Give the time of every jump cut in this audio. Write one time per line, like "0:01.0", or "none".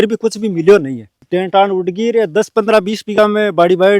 0:01.2